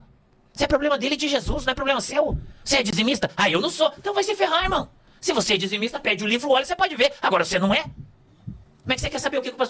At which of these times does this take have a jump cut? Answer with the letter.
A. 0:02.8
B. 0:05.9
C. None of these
A